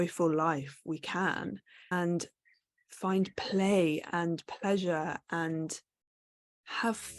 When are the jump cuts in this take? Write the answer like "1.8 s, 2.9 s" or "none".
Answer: 1.9 s